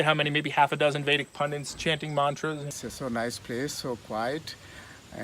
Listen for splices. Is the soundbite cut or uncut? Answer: cut